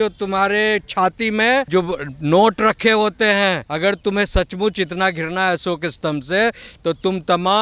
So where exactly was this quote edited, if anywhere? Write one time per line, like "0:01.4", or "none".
0:01.7
0:03.7